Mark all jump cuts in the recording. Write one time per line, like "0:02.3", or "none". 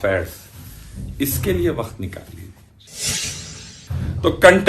0:03.2

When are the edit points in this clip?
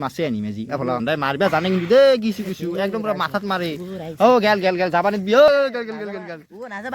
0:00.9
0:05.5

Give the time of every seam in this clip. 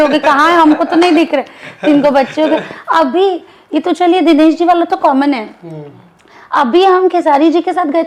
none

